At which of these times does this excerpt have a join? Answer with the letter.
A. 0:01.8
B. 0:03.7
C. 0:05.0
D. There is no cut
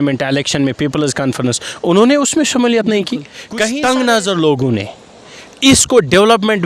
B